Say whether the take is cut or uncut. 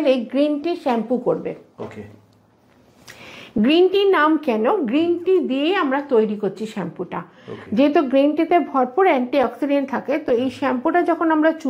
uncut